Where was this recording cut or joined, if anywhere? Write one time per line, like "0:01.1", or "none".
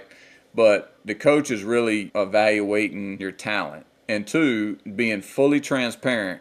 0:01.0
0:02.1
0:03.3